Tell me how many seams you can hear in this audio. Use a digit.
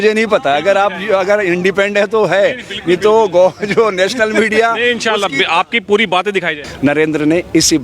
1